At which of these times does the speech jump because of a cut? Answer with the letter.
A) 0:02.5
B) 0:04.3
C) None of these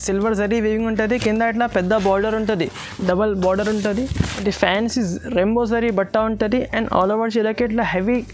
B